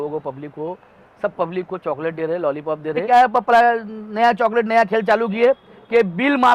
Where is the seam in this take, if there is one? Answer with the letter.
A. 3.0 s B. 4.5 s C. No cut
A